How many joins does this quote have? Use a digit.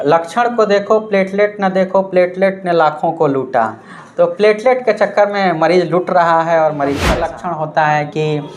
1